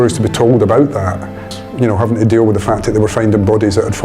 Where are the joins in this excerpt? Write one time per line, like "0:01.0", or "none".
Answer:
0:01.4